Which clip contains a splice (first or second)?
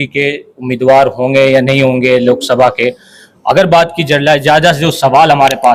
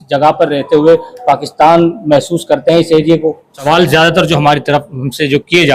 second